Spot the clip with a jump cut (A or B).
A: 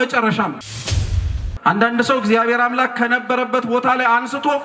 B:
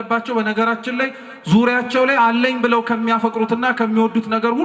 A